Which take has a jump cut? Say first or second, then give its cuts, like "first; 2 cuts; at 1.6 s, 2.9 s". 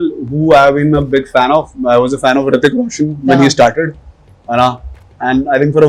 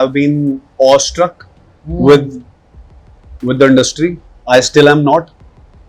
second; 1 cut; at 4.3 s